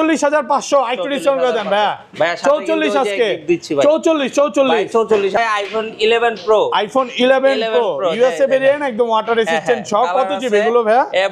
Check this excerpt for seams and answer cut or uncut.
cut